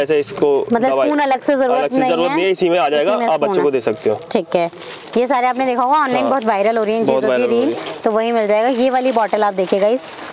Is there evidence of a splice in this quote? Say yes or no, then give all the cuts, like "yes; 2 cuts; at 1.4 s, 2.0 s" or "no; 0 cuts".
no; 0 cuts